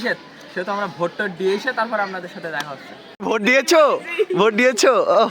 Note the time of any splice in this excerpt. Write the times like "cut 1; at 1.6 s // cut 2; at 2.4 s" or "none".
cut 1; at 3.2 s